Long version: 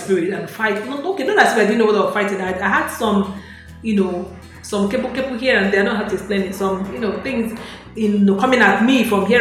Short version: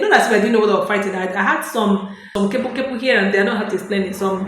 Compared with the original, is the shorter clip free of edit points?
no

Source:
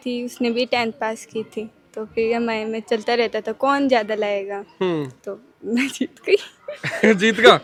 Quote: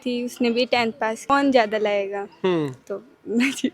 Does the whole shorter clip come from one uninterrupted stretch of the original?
no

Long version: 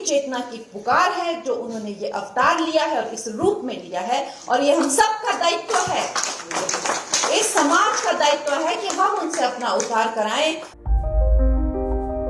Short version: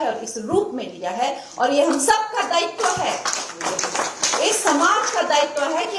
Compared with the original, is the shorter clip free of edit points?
yes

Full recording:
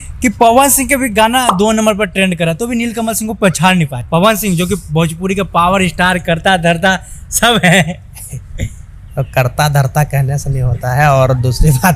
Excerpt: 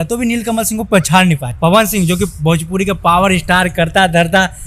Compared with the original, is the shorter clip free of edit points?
yes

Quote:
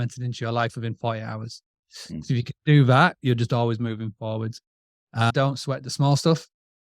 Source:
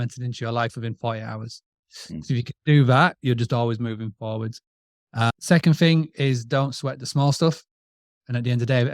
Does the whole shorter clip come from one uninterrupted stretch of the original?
no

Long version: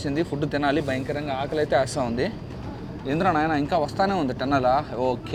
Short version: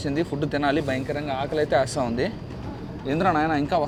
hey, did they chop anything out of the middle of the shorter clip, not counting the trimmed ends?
no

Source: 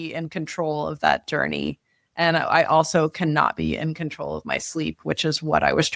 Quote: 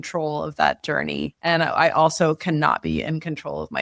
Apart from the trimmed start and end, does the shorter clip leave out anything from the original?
yes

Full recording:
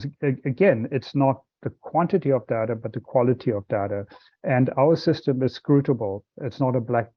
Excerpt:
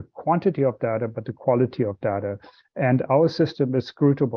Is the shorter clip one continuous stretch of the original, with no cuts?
yes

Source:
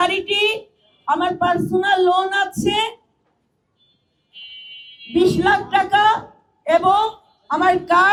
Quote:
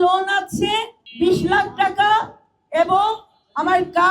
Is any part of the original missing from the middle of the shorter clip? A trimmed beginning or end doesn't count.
yes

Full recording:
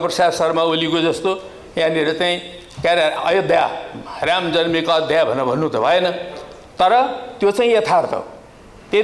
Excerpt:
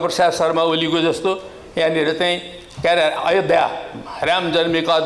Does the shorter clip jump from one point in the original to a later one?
no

